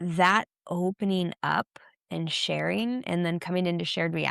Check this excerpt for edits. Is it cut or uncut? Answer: uncut